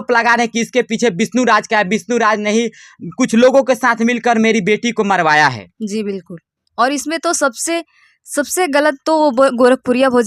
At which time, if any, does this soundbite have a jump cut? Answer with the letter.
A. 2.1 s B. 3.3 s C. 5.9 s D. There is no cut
D